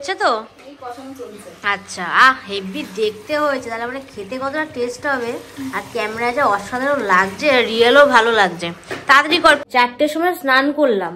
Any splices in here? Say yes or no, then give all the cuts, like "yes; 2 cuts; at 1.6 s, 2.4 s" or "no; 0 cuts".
yes; 1 cut; at 9.6 s